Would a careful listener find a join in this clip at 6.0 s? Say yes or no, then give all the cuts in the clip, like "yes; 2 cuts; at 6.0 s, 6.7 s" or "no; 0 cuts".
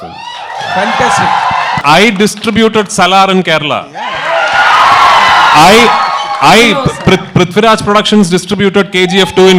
no; 1 cut; at 1.8 s